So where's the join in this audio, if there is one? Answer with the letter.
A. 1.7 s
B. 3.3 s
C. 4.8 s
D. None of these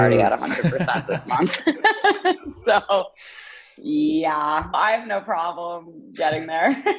C